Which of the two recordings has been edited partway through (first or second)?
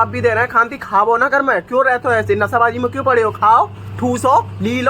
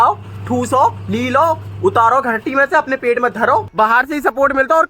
second